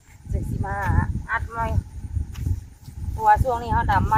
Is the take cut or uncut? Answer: uncut